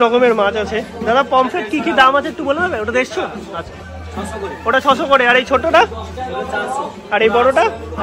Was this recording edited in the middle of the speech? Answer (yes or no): no